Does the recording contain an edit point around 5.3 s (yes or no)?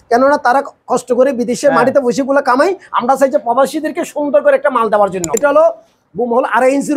yes